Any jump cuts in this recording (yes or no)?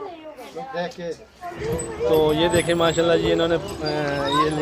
yes